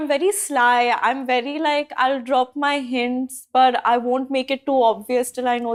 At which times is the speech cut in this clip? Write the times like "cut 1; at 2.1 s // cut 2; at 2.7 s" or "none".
none